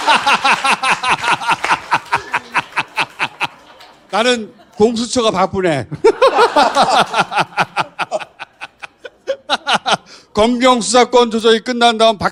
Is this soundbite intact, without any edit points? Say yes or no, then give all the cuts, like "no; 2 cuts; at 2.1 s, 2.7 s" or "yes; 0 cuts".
yes; 0 cuts